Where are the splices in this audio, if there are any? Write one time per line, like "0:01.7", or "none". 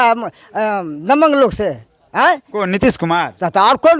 none